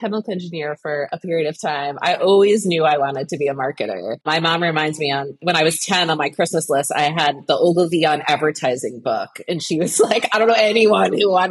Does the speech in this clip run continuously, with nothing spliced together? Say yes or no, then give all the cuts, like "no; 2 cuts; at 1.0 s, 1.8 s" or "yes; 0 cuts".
no; 2 cuts; at 4.2 s, 5.4 s